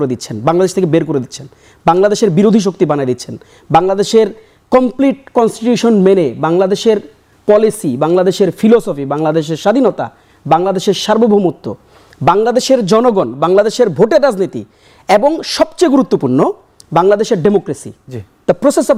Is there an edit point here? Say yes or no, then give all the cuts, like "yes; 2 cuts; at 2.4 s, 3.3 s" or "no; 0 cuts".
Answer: no; 0 cuts